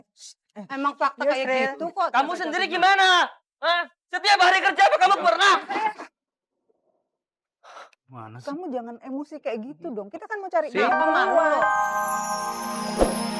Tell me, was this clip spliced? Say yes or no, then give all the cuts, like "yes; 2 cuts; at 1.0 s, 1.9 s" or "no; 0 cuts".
yes; 1 cut; at 11.6 s